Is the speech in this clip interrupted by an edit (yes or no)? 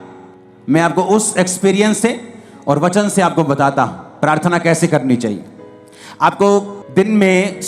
yes